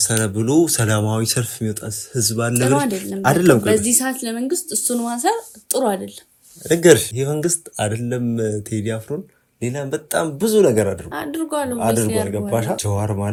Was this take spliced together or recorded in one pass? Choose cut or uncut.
uncut